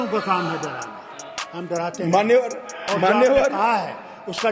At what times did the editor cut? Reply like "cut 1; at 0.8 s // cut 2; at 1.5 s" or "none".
none